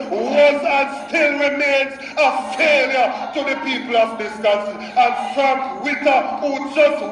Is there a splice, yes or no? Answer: no